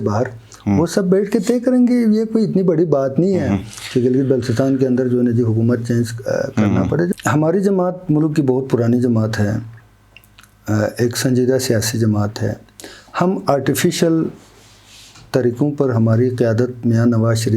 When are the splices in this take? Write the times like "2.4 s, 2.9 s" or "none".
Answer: 7.1 s